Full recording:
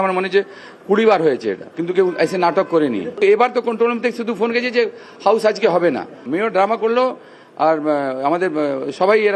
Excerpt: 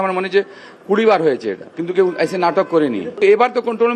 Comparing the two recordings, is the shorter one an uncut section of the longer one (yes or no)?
yes